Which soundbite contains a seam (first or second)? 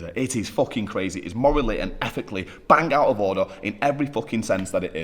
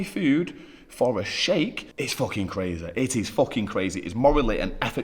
second